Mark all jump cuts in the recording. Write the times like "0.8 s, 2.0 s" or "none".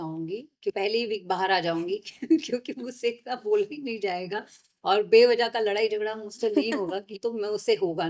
0.7 s, 7.1 s